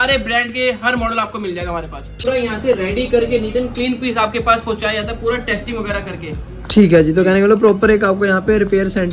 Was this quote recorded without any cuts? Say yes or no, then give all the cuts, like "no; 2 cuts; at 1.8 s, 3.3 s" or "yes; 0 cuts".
no; 1 cut; at 2.2 s